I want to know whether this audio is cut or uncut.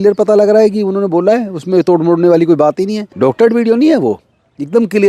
cut